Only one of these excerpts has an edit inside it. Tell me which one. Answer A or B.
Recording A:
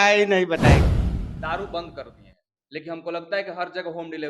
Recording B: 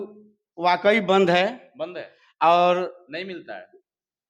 A